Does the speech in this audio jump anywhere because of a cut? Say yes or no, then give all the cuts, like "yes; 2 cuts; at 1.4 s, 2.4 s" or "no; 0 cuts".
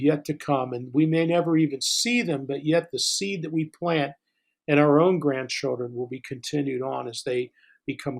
no; 0 cuts